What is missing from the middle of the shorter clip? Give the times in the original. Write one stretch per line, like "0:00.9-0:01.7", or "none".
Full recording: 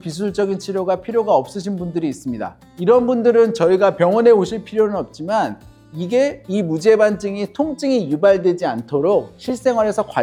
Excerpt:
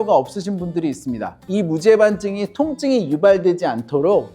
0:02.6-0:06.4